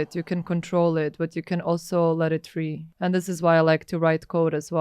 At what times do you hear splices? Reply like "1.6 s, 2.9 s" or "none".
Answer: 2.8 s